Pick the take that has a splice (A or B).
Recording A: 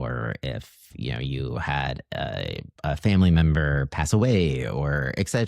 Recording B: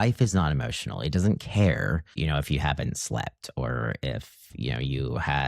B